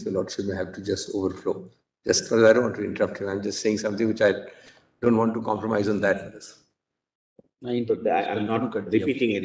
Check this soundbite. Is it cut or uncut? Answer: uncut